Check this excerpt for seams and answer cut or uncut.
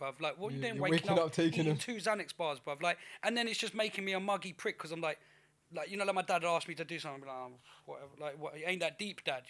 uncut